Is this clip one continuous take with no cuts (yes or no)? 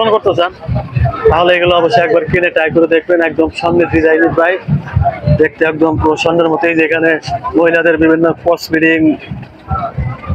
yes